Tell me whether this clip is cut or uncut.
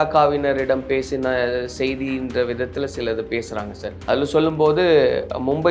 uncut